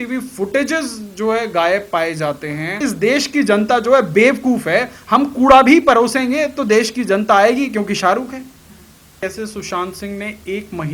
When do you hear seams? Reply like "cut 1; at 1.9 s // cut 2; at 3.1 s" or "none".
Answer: cut 1; at 2.8 s // cut 2; at 9.1 s